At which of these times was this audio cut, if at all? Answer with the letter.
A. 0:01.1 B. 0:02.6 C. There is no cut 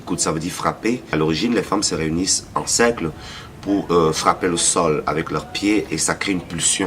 A